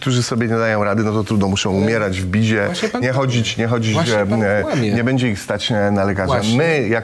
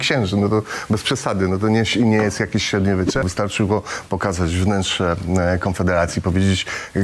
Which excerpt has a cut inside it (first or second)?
second